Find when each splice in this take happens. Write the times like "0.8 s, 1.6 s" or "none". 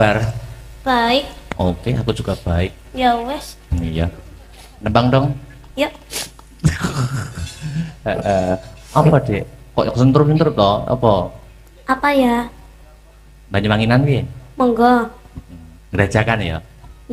none